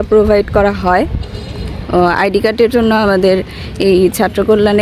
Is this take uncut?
yes; 0 cuts

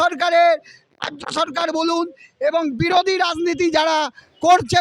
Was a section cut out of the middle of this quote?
no; 0 cuts

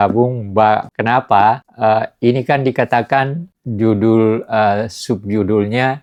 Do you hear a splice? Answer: no; 0 cuts

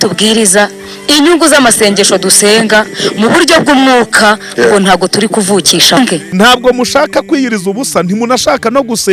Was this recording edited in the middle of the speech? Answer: yes; 1 cut; at 6.2 s

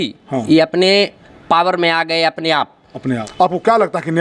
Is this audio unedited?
no; 1 cut; at 3.3 s

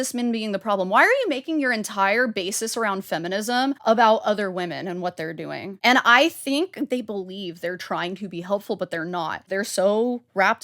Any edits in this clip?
yes; 4 cuts; at 3.8 s, 5.7 s, 6.9 s, 9.5 s

